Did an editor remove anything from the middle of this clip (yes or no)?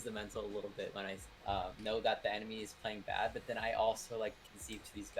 yes